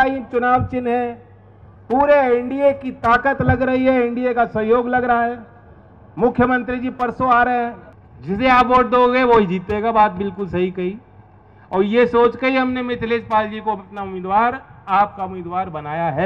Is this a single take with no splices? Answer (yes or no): no